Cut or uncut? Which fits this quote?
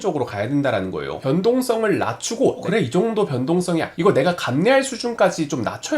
cut